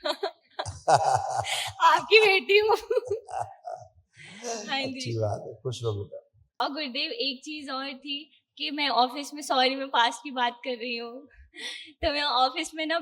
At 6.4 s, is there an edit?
yes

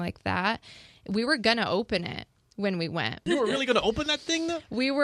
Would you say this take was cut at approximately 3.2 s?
yes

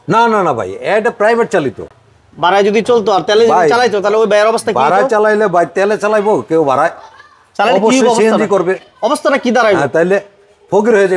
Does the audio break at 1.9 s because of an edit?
no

